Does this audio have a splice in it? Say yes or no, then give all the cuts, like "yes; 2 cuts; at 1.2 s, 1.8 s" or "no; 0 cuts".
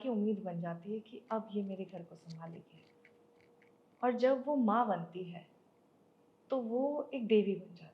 no; 0 cuts